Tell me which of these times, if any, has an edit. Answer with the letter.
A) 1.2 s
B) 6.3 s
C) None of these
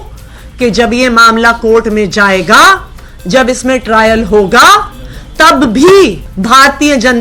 B